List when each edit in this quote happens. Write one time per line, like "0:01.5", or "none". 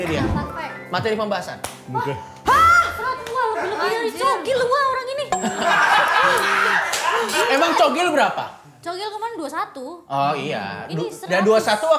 none